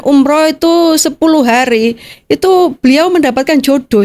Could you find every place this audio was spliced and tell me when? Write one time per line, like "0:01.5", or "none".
none